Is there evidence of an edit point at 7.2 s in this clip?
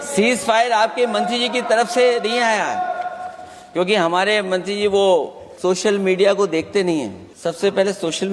yes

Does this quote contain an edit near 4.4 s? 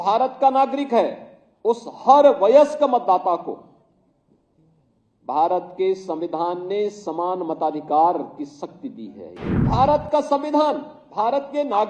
no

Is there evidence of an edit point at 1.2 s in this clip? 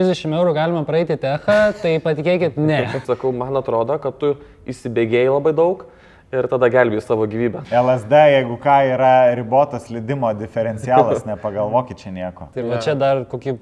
no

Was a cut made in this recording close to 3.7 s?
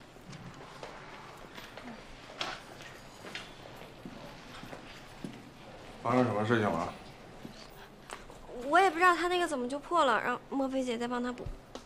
yes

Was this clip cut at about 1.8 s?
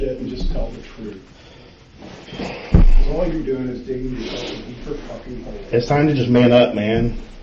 no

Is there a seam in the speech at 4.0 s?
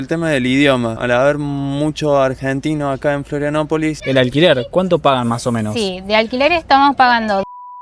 yes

